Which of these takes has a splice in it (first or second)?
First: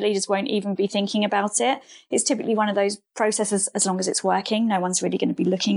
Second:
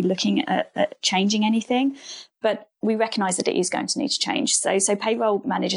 first